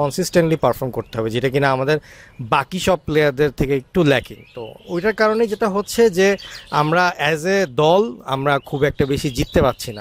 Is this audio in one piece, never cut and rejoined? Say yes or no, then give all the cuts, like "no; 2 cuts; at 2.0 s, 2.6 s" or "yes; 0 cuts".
yes; 0 cuts